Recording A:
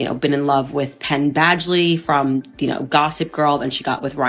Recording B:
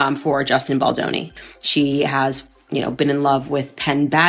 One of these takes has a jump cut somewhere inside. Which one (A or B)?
B